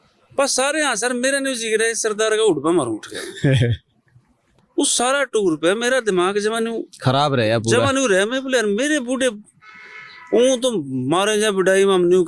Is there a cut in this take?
yes; 1 cut; at 4.5 s

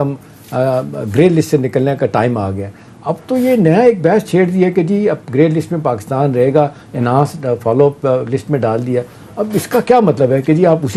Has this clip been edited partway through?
no; 0 cuts

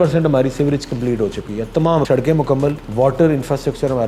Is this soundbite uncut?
no; 2 cuts; at 2.0 s, 2.8 s

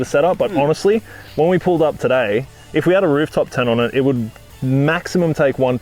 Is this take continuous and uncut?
yes; 0 cuts

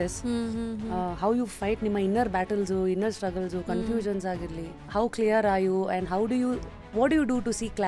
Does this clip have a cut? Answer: no; 0 cuts

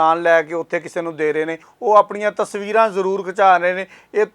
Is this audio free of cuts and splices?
no; 1 cut; at 1.7 s

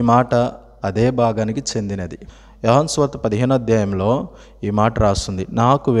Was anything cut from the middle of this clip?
yes; 1 cut; at 2.2 s

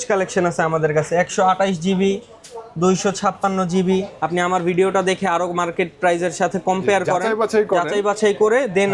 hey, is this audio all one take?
no; 1 cut; at 4.3 s

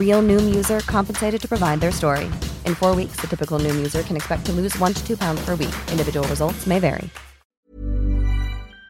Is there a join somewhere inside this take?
yes; 1 cut; at 7.7 s

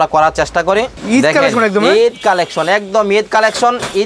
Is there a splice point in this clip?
yes; 1 cut; at 1.0 s

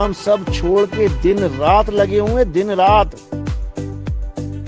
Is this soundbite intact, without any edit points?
no; 1 cut; at 3.8 s

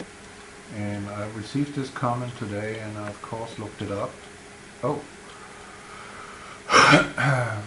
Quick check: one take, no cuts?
yes; 0 cuts

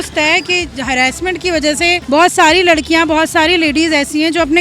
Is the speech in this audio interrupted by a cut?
yes; 1 cut; at 2.0 s

